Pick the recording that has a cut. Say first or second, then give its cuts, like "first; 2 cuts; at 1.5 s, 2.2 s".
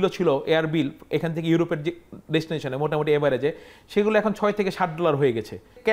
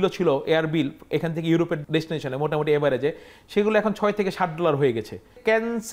second; 1 cut; at 1.8 s